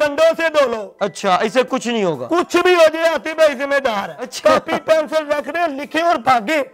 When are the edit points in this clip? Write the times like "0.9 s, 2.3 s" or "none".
4.2 s